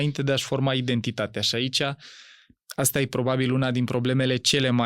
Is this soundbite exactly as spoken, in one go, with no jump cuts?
yes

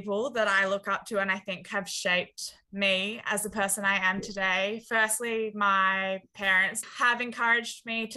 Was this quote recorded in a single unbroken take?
yes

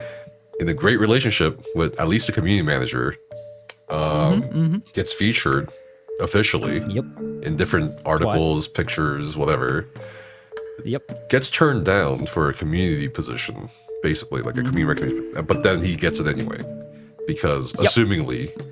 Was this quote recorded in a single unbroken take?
yes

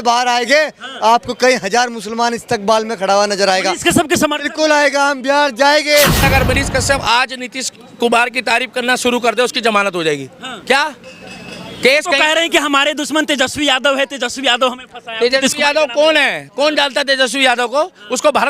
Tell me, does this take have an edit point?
yes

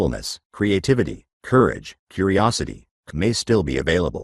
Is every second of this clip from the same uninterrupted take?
no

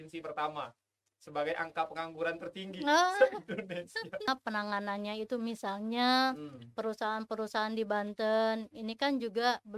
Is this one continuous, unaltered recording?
no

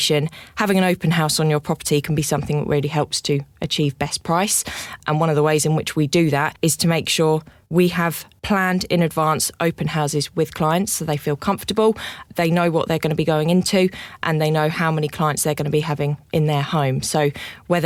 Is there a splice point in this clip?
no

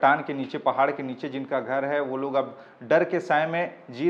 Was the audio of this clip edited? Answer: no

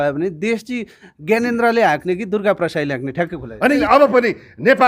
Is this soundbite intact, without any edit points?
no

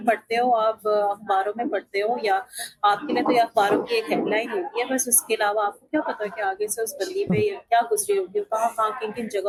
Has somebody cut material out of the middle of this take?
no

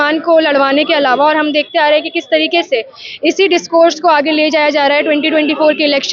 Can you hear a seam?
no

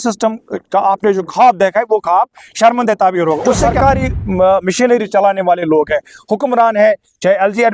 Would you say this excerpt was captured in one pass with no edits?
no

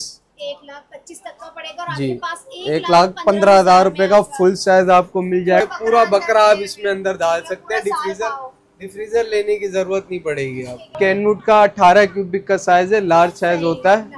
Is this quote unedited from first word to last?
no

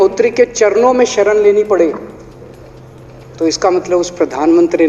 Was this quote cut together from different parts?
no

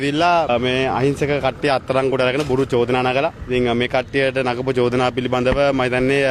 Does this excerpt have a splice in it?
no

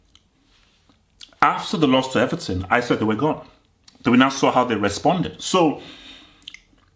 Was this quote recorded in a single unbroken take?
yes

